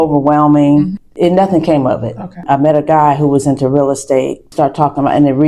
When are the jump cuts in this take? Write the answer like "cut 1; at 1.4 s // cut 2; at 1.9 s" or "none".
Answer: cut 1; at 1.0 s // cut 2; at 2.4 s // cut 3; at 4.4 s